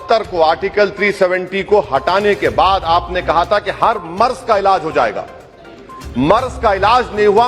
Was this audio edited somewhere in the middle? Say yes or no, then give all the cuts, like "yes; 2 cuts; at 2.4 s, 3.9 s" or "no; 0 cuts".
no; 0 cuts